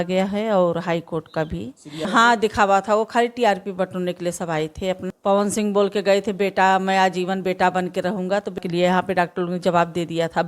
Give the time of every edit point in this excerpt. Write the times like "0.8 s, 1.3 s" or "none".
2.1 s, 5.1 s, 8.6 s